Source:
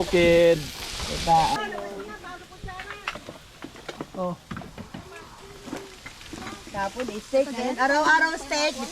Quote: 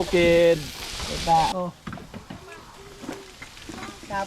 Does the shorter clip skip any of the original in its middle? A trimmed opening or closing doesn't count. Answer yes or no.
yes